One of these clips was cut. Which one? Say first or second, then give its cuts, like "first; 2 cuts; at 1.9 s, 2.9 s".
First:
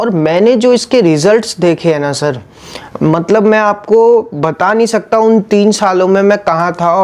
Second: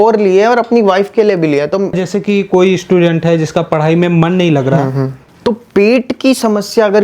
second; 2 cuts; at 2.0 s, 5.2 s